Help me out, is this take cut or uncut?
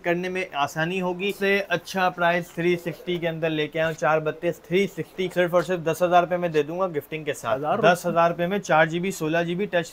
cut